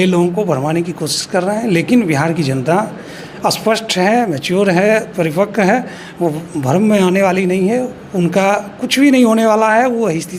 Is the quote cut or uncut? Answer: uncut